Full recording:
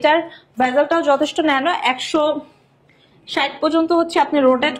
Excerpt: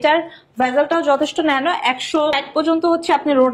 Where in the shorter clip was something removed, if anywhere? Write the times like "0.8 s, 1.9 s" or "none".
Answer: 2.4 s